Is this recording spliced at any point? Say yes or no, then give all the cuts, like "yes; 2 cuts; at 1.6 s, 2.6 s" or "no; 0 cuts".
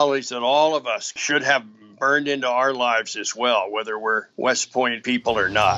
yes; 3 cuts; at 1.1 s, 4.3 s, 5.0 s